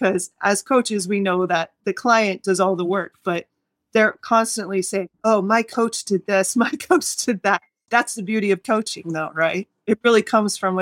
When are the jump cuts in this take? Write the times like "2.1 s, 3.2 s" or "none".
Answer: 1.8 s, 7.7 s, 9.7 s